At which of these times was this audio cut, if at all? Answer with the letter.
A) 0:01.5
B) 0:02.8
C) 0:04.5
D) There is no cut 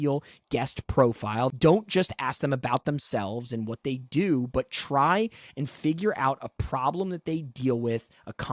A